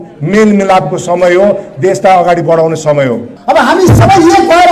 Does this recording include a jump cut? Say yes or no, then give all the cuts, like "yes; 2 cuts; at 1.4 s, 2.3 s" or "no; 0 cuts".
yes; 1 cut; at 3.3 s